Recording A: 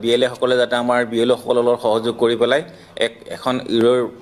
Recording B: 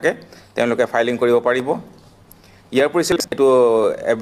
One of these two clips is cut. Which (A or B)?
B